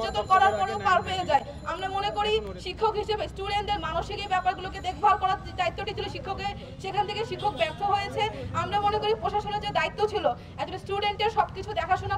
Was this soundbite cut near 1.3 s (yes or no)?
no